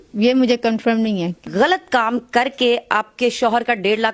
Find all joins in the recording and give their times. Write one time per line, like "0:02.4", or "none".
0:01.4